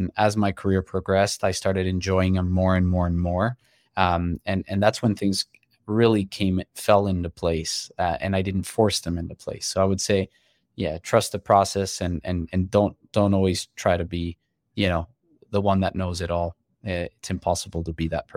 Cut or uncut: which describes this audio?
uncut